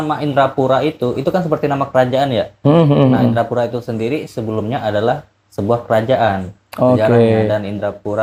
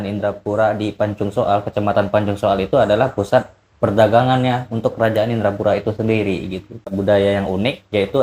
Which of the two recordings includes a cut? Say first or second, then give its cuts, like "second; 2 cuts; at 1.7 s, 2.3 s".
second; 1 cut; at 7.0 s